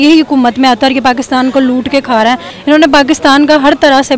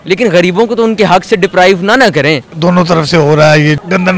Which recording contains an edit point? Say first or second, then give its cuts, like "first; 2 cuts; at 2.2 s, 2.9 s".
first; 1 cut; at 2.5 s